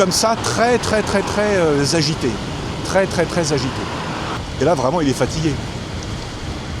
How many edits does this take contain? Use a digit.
1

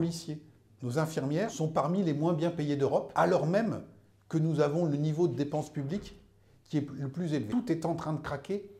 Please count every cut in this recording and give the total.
3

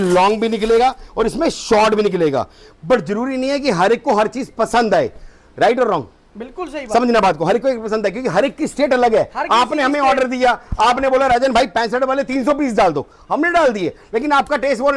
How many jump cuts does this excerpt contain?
0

